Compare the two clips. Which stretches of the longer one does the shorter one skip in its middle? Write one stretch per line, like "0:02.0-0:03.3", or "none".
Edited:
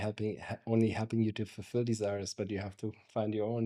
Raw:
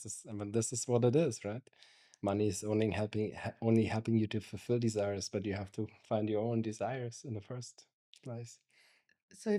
none